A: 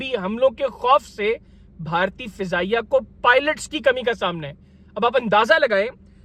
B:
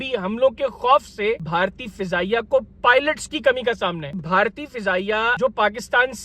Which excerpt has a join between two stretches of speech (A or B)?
B